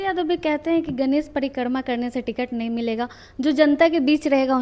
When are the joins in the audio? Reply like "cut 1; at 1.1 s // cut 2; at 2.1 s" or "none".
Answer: none